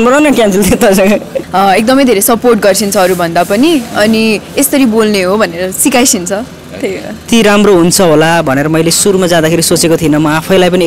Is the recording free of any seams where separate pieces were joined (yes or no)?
no